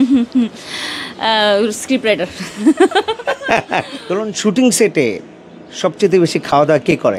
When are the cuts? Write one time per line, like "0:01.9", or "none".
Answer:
0:04.0